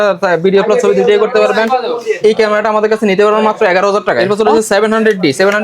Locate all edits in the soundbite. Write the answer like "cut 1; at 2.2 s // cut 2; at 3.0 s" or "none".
cut 1; at 4.2 s